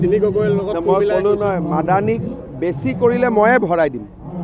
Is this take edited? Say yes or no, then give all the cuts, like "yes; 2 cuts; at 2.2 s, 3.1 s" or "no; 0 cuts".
no; 0 cuts